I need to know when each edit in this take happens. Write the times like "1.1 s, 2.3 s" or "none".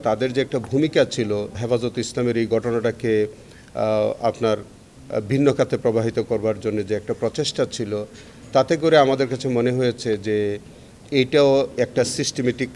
1.6 s